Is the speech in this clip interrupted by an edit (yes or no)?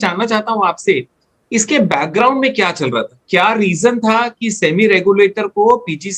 no